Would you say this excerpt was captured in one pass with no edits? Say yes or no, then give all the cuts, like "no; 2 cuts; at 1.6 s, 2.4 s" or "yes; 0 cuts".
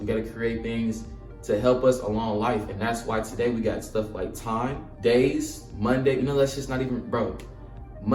yes; 0 cuts